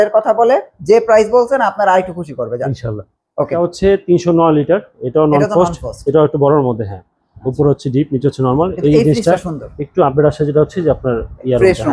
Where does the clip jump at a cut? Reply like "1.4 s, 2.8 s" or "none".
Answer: 3.6 s